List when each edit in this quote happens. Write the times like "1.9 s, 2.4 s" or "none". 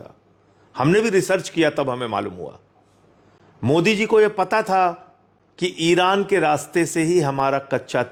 none